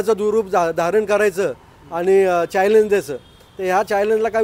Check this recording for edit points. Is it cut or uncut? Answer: uncut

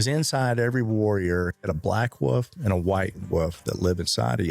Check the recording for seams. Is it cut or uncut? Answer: cut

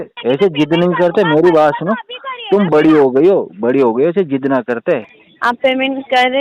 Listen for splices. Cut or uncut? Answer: cut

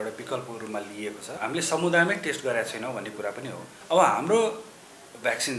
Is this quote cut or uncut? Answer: cut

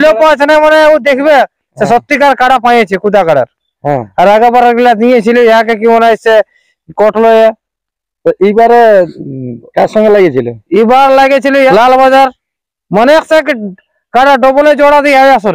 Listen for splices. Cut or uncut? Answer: uncut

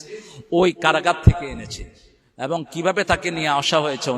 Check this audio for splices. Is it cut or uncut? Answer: uncut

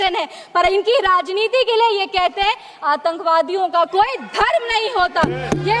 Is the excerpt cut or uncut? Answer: uncut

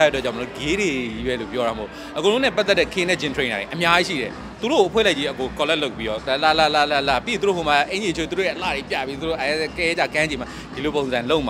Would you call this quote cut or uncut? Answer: uncut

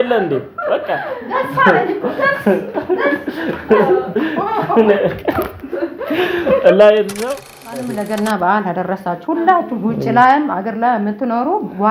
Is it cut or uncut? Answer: cut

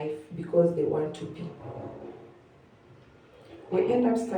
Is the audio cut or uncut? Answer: uncut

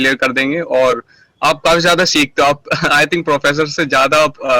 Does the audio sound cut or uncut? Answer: uncut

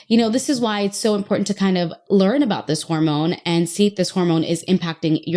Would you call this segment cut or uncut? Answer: uncut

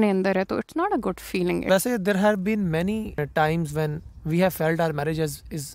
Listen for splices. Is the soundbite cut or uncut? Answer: cut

